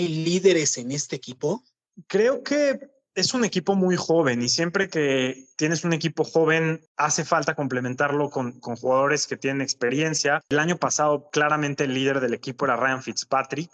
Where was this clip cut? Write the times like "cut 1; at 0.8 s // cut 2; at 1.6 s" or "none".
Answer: none